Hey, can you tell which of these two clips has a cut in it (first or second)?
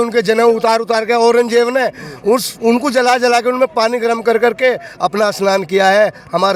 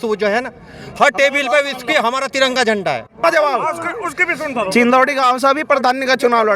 second